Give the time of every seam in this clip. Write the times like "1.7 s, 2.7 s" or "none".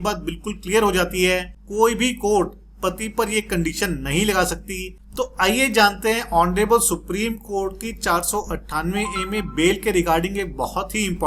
1.6 s, 5.0 s